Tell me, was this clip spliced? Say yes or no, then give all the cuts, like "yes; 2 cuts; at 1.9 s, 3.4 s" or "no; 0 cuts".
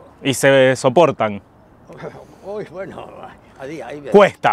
no; 0 cuts